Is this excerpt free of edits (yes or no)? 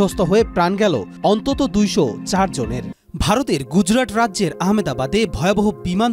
no